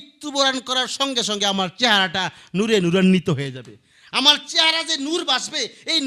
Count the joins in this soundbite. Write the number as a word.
zero